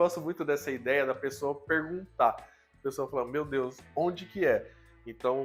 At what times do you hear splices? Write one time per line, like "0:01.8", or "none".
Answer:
none

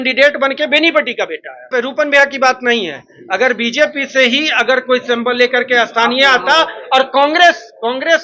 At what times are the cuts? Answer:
0:01.7

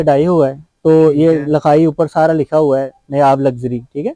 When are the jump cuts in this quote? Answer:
none

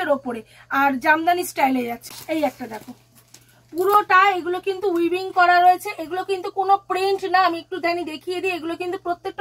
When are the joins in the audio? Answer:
0:02.1

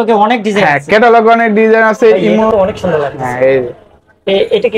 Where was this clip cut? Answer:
0:02.5

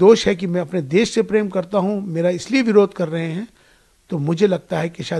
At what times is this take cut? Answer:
none

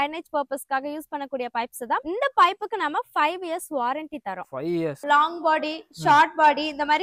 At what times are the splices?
0:02.0
0:05.0

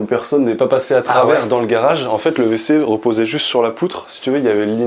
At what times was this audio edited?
none

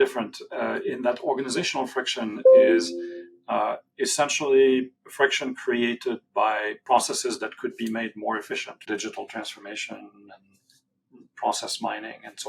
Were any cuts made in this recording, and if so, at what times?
0:06.8
0:08.8

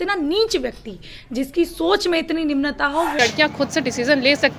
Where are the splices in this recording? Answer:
0:03.2

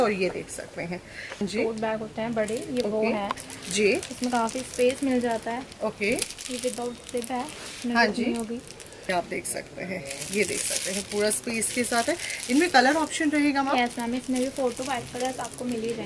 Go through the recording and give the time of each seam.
0:01.4
0:08.9

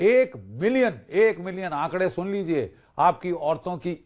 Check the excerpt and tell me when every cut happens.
none

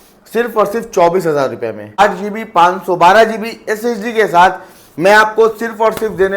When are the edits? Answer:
0:02.0

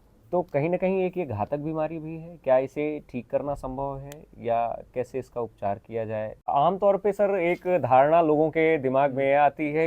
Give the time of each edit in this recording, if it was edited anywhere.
0:06.4

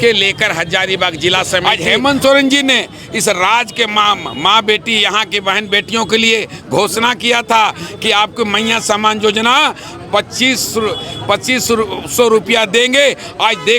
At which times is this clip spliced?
0:01.6

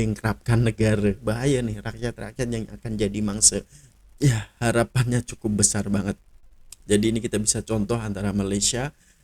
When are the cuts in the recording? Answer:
0:01.2
0:03.9

